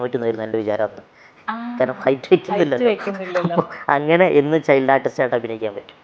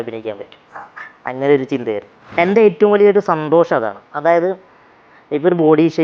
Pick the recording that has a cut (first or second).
second